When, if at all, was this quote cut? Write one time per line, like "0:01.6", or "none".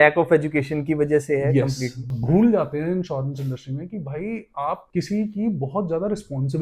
0:02.1
0:04.9